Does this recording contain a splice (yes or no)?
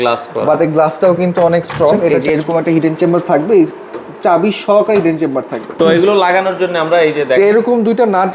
yes